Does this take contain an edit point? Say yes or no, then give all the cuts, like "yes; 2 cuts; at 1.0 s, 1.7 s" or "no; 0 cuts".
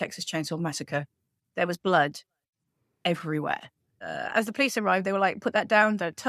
yes; 1 cut; at 4.1 s